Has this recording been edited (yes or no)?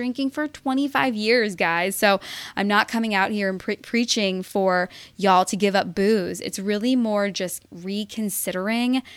no